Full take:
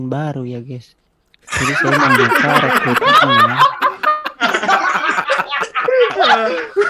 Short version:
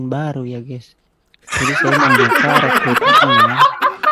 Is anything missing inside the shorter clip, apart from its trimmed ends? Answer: no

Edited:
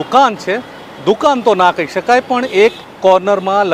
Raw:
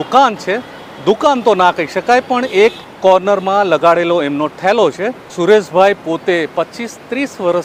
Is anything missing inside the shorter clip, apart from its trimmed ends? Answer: no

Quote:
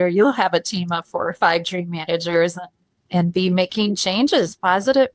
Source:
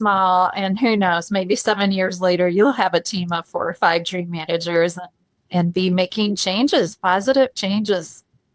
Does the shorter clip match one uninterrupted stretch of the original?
yes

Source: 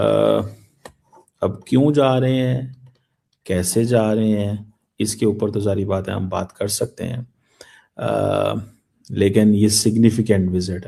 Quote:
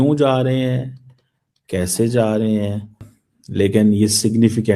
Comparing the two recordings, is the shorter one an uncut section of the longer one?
no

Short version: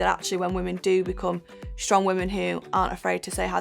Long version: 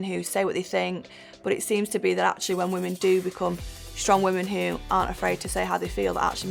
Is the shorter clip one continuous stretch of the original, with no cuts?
yes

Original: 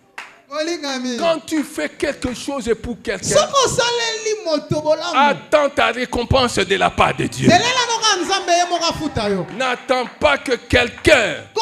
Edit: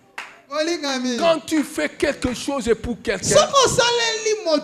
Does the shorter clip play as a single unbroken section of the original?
yes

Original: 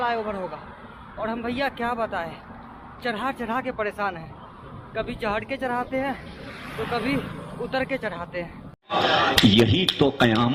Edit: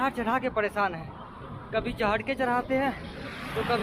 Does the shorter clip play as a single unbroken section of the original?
yes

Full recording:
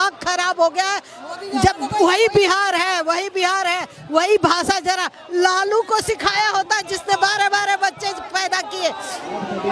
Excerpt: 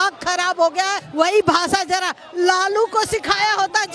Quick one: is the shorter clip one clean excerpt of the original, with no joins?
no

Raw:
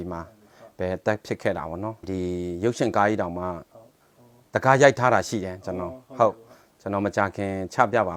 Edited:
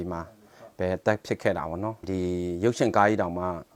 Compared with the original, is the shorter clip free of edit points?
yes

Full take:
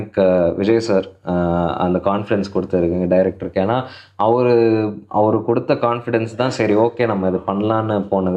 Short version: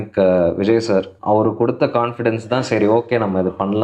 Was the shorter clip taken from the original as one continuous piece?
no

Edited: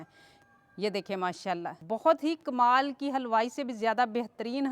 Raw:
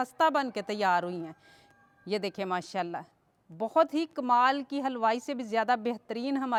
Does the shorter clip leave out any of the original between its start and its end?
yes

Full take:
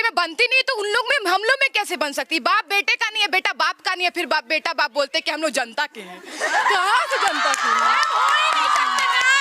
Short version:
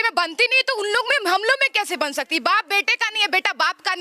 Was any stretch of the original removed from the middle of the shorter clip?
no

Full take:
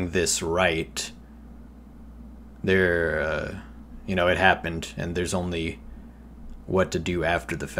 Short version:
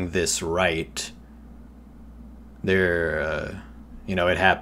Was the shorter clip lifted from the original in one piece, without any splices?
yes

